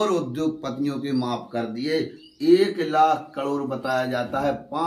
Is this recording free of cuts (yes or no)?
yes